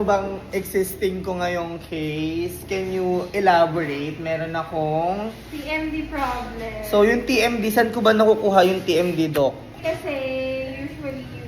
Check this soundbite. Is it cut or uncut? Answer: uncut